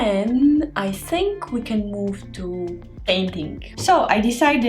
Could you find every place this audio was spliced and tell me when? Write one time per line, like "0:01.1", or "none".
0:03.6